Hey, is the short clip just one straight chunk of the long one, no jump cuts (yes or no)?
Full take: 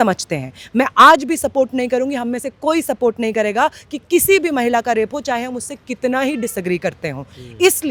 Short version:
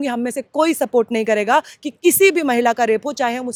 yes